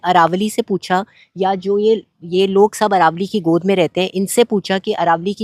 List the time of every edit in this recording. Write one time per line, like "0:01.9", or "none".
none